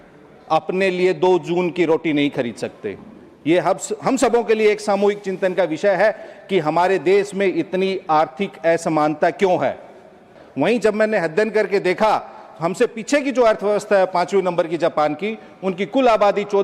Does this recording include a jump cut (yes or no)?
yes